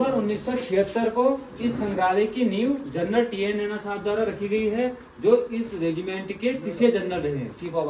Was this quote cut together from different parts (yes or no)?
no